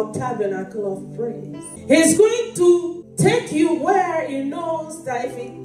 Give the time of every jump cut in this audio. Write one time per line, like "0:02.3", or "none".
0:01.7
0:03.0